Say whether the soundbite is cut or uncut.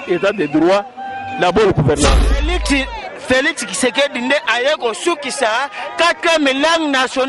cut